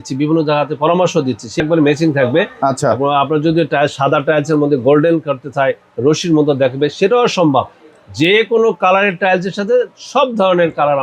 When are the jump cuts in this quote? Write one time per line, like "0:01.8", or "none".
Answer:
0:01.6